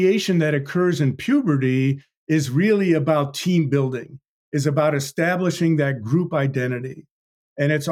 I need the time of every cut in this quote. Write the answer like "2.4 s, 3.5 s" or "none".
none